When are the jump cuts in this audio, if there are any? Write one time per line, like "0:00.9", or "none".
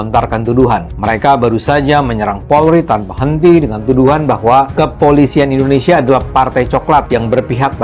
0:00.9
0:04.7
0:07.1